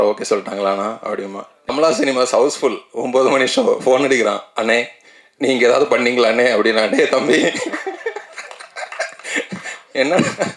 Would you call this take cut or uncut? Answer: cut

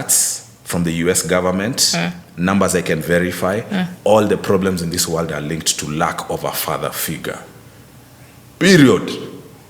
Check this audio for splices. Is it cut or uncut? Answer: uncut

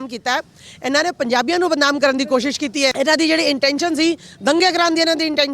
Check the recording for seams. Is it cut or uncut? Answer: cut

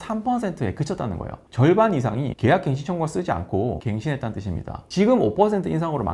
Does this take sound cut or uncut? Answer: cut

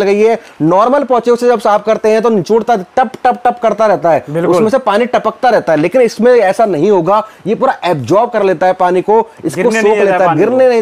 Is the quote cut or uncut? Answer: uncut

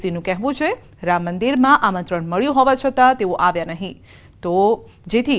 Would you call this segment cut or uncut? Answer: cut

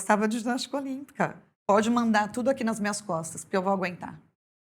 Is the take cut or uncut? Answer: cut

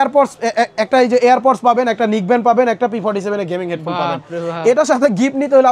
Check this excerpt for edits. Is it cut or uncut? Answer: uncut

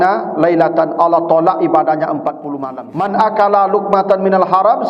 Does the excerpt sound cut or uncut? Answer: cut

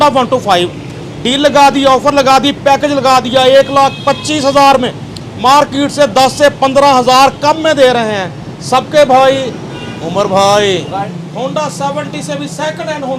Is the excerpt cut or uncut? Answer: cut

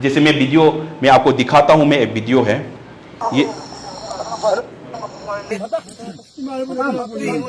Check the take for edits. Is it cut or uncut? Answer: cut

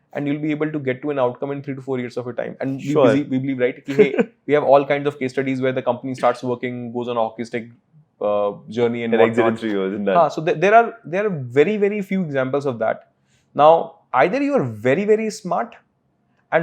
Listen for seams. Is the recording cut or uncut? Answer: uncut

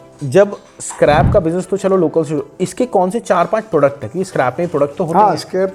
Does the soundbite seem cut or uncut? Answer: uncut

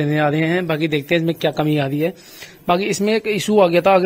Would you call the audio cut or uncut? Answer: uncut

